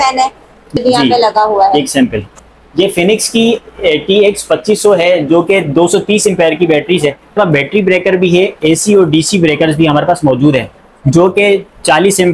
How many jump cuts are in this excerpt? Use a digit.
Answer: 3